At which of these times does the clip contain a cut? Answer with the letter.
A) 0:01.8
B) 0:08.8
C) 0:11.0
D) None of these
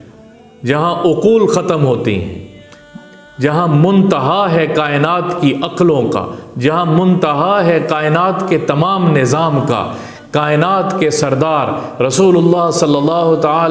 D